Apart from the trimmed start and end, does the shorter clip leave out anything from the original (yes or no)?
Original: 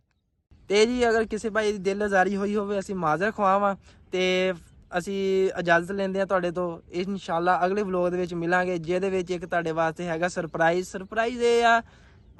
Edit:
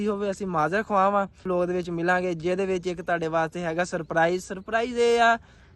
yes